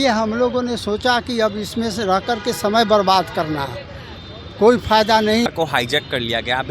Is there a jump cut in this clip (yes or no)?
yes